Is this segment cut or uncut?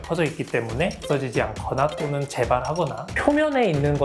cut